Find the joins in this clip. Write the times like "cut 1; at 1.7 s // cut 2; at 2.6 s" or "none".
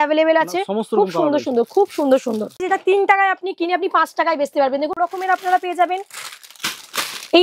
cut 1; at 2.6 s // cut 2; at 4.9 s